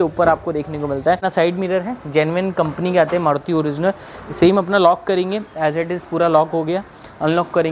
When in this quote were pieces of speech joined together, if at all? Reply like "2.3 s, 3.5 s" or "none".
1.2 s